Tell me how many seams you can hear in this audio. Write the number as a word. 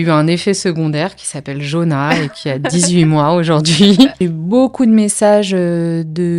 one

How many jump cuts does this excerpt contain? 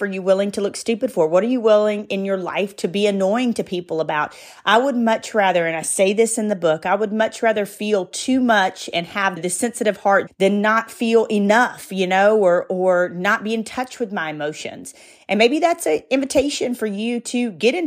zero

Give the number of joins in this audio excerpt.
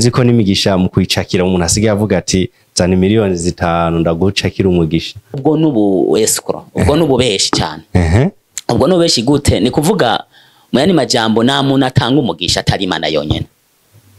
one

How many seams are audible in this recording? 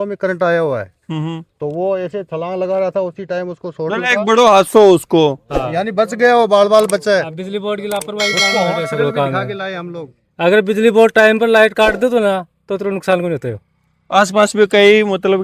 zero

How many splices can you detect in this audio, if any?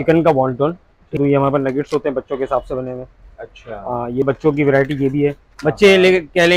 two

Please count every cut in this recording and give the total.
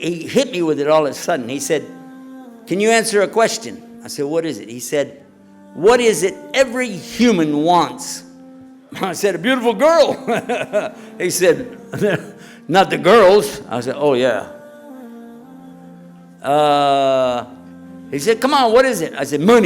two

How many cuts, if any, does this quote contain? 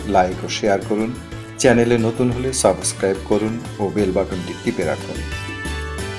one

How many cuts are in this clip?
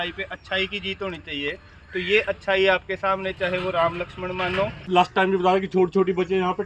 one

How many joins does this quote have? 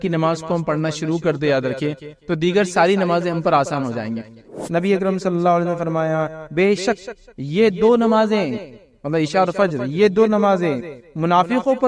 one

